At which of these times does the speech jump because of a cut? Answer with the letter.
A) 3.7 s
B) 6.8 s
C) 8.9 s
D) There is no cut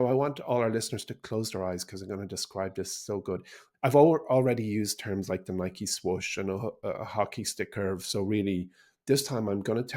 A